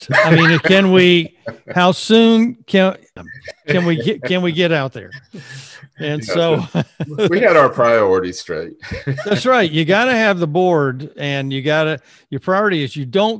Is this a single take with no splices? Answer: no; 1 cut; at 3.2 s

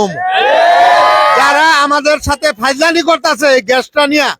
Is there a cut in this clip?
no; 0 cuts

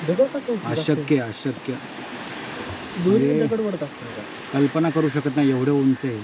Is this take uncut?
yes; 0 cuts

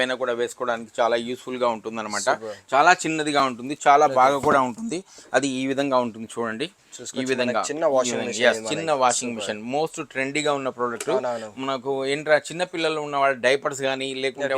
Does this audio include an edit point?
no; 0 cuts

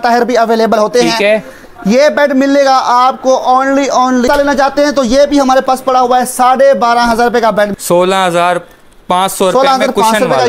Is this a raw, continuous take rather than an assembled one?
no; 2 cuts; at 4.3 s, 7.7 s

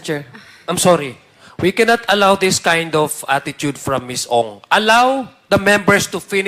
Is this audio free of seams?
yes; 0 cuts

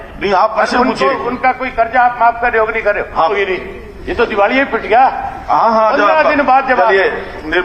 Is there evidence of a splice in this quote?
yes; 1 cut; at 3.3 s

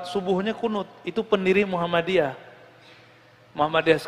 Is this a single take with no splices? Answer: yes; 0 cuts

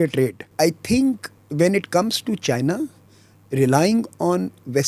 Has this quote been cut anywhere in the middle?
yes; 1 cut; at 1.0 s

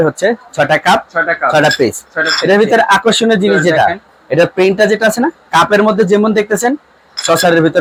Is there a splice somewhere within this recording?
no; 0 cuts

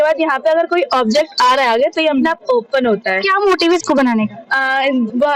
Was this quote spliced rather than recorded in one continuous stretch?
no; 0 cuts

